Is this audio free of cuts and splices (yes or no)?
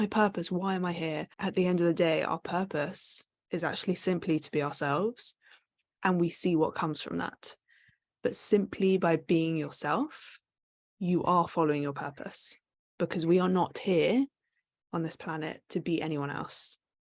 no